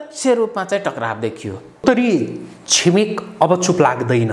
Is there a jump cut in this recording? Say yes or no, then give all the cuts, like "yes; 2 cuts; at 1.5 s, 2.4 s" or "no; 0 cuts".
yes; 1 cut; at 1.8 s